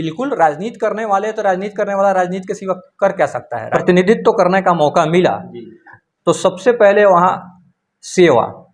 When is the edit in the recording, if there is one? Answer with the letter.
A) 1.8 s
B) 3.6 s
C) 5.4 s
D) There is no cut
B